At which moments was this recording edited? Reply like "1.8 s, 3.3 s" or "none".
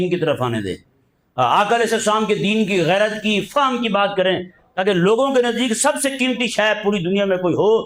none